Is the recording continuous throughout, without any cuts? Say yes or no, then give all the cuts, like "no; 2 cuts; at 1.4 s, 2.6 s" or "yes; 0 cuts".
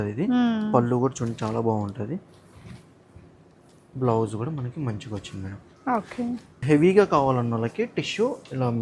no; 1 cut; at 6.6 s